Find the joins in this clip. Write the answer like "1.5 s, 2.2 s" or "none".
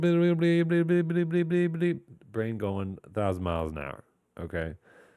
none